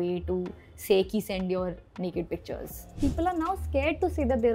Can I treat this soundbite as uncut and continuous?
no; 1 cut; at 3.0 s

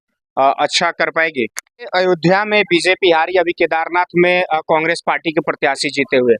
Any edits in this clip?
yes; 1 cut; at 1.9 s

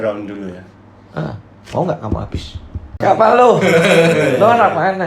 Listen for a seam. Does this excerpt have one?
yes; 1 cut; at 2.9 s

